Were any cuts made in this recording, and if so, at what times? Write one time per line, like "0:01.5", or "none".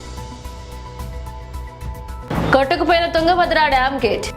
0:01.7